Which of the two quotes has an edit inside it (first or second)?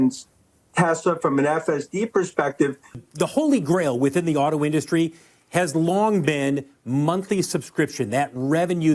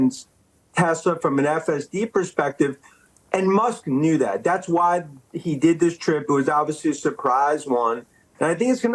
first